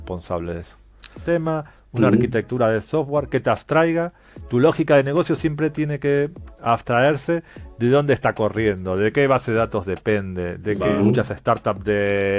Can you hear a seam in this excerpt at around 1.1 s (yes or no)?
yes